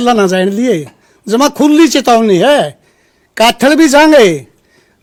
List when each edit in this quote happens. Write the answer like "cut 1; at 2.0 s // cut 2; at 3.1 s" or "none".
none